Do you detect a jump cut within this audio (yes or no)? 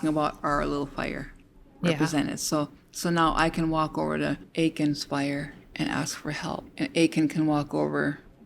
yes